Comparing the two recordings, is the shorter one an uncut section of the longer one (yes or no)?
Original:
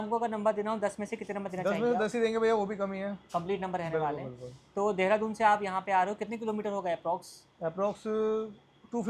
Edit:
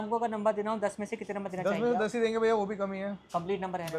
yes